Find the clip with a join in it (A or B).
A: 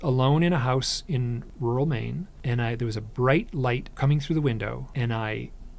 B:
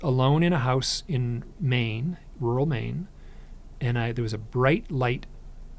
A